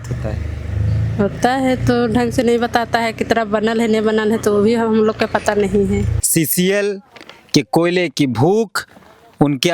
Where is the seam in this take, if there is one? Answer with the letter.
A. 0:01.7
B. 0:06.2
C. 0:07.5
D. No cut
B